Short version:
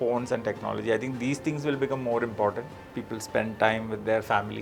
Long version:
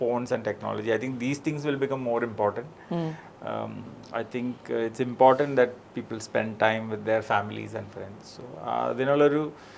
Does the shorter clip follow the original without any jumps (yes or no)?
no